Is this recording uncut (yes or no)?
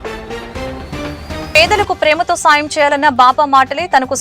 no